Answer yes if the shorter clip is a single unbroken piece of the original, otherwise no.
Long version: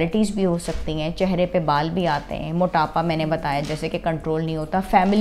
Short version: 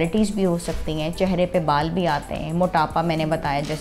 yes